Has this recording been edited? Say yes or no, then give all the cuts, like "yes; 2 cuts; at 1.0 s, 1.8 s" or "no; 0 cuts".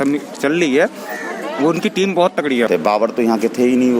yes; 1 cut; at 2.7 s